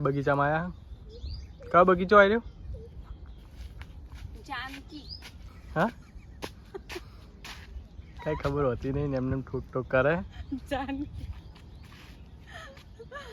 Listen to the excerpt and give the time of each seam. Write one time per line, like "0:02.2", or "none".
none

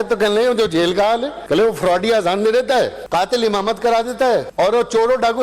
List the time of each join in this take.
0:01.3
0:03.0
0:04.5

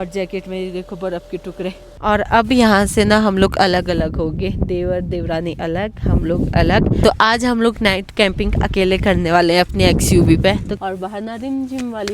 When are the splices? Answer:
0:02.0
0:07.0
0:10.8

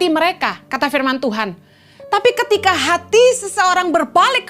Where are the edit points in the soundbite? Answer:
none

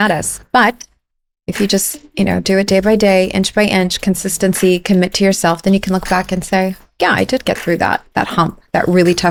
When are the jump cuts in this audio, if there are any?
none

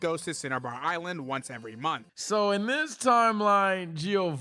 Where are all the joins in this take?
0:02.1

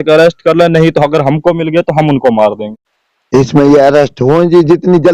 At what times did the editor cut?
0:02.7

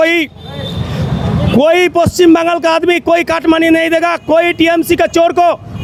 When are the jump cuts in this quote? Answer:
none

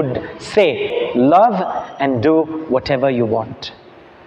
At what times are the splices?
0:00.9

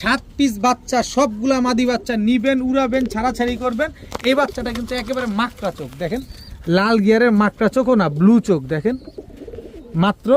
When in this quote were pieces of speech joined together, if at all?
none

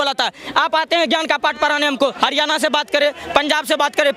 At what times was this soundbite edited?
0:02.1

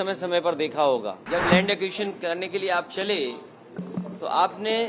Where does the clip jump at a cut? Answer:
0:01.2

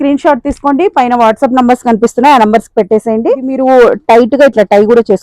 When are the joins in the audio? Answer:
0:03.5

